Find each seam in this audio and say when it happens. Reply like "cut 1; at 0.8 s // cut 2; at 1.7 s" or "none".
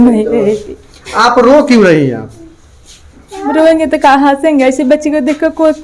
none